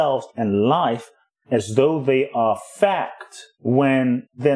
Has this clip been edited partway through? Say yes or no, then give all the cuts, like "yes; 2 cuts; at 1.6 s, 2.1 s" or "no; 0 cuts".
no; 0 cuts